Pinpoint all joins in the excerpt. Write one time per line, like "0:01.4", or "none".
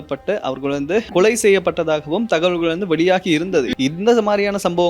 0:01.1
0:03.7

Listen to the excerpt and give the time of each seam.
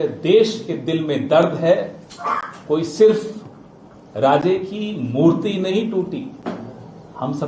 none

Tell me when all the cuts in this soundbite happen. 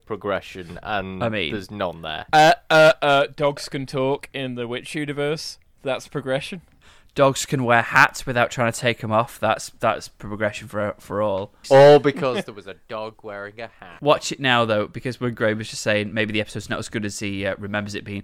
0:11.6
0:13.9

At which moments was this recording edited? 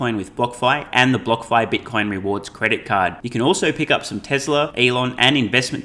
0:04.7

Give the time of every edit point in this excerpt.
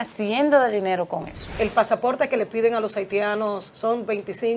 0:01.5
0:03.7

